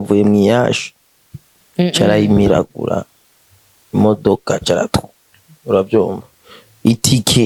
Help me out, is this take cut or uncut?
uncut